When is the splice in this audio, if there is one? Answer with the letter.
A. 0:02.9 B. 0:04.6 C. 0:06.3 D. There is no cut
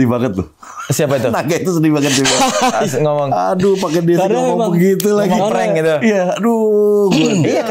D